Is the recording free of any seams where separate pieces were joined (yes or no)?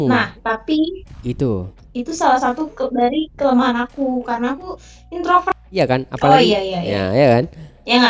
no